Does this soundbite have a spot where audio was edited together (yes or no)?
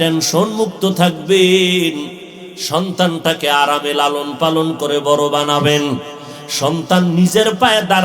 no